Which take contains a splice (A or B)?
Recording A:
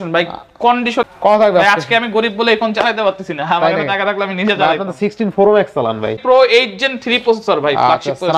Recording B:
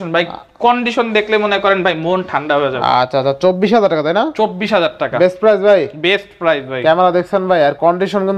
A